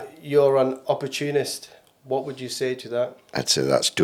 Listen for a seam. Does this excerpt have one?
no; 0 cuts

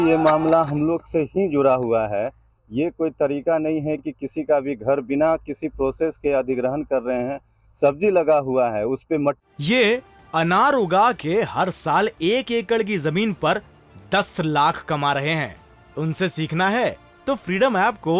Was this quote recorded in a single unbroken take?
no; 1 cut; at 9.4 s

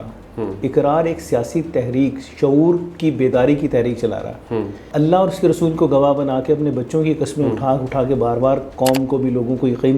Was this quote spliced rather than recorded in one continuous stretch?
yes; 1 cut; at 4.8 s

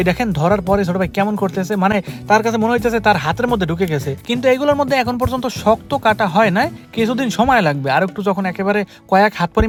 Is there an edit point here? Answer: no; 0 cuts

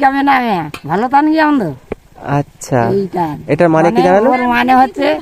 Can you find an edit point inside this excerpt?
no; 0 cuts

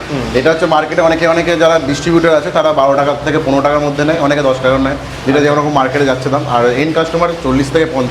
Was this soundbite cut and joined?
no; 0 cuts

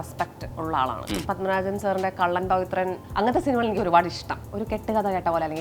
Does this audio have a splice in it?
yes; 3 cuts; at 1.2 s, 3.0 s, 4.3 s

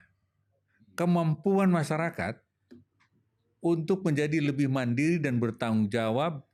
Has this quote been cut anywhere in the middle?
no; 0 cuts

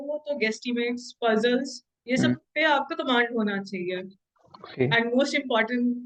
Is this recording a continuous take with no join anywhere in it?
yes; 0 cuts

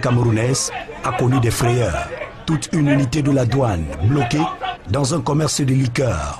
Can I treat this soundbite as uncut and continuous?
no; 1 cut; at 3.6 s

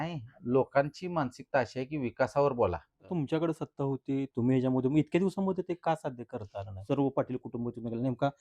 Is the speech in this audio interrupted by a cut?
yes; 2 cuts; at 3.0 s, 6.7 s

